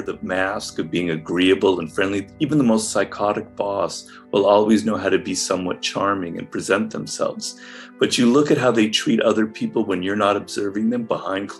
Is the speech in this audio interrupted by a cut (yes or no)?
no